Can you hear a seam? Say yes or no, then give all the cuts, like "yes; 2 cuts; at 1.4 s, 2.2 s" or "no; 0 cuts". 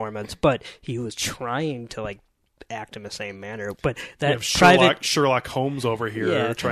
no; 0 cuts